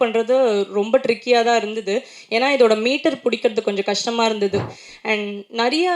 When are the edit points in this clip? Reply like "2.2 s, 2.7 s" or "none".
4.7 s